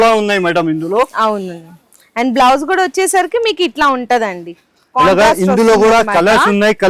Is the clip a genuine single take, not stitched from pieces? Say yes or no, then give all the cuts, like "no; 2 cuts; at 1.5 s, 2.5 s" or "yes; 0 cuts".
yes; 0 cuts